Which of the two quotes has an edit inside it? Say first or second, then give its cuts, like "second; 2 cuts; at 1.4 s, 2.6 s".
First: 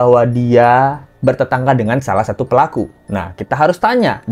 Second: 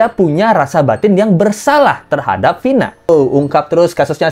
second; 1 cut; at 3.1 s